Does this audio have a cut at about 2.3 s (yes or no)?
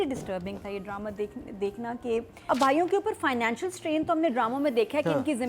yes